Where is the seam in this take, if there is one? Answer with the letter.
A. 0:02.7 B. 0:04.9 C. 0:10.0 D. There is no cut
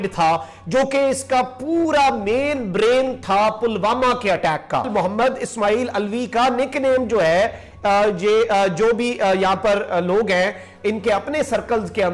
B